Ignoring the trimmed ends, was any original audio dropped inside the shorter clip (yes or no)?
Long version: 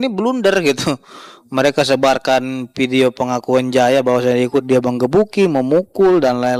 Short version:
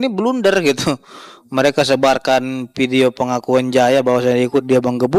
no